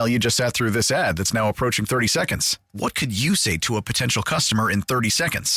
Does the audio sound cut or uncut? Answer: uncut